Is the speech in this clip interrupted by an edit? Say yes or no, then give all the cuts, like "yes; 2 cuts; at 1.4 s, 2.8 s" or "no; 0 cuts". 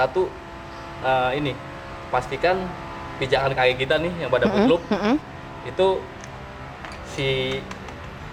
no; 0 cuts